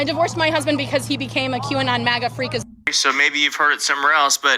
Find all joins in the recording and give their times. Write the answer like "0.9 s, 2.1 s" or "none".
2.6 s